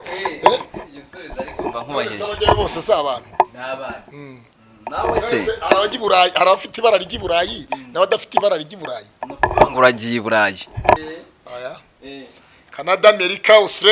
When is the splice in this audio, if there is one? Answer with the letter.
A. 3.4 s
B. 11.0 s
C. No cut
B